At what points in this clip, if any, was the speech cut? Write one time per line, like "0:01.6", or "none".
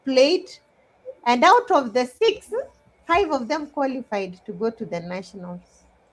none